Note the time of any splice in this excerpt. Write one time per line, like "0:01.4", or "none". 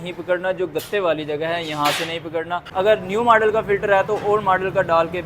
0:02.7